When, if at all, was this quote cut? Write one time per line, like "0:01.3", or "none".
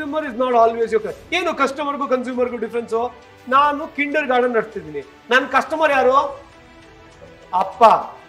none